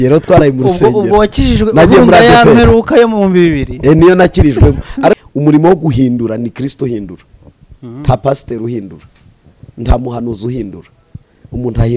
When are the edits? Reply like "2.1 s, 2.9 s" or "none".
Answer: 5.2 s